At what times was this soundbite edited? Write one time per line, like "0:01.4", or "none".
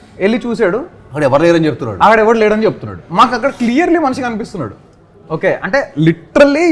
none